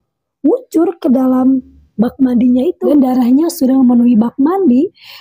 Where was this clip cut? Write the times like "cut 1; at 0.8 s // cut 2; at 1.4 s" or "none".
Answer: cut 1; at 2.9 s